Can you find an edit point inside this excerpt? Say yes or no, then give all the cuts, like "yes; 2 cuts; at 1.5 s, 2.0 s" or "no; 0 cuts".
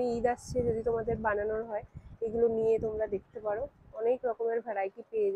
no; 0 cuts